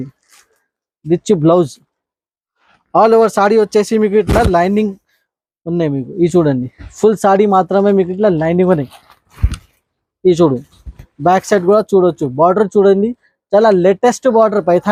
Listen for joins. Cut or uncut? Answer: uncut